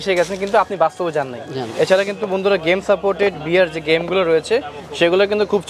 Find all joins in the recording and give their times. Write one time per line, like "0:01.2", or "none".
0:01.6